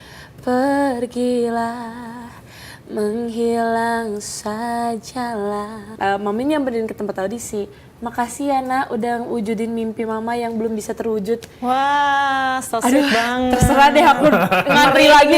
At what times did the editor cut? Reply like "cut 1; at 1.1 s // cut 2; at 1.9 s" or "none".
cut 1; at 5.8 s